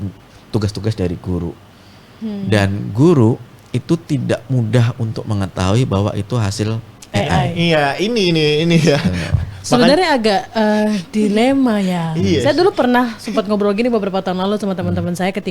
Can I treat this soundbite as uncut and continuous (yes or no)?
yes